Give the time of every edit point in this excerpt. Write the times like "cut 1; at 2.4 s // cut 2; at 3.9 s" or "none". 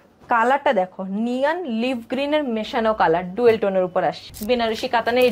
cut 1; at 4.3 s